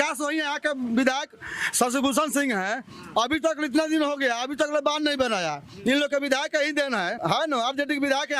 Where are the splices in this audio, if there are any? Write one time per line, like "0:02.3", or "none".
0:07.1

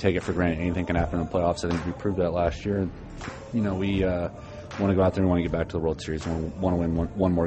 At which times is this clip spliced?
none

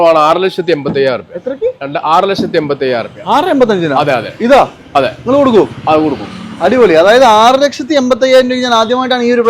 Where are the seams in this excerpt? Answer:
none

